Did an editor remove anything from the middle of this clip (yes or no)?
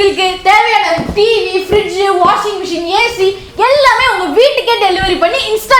no